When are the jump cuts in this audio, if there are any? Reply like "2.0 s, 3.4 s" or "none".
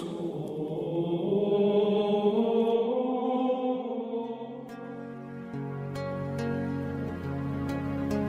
none